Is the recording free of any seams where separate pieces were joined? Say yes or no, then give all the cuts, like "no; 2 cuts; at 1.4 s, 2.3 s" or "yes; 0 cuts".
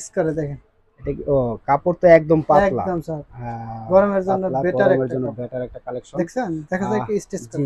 yes; 0 cuts